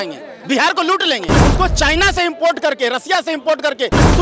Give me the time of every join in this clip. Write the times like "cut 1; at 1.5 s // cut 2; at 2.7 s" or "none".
cut 1; at 1.3 s